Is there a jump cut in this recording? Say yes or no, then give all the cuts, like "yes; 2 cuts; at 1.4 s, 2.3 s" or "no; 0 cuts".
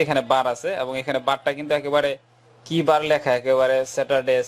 no; 0 cuts